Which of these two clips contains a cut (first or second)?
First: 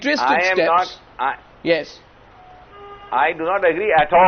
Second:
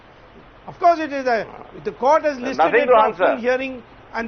first